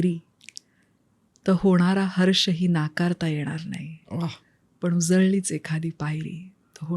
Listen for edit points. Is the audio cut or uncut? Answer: uncut